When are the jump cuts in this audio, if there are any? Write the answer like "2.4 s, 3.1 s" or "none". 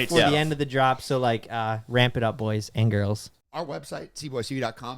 3.4 s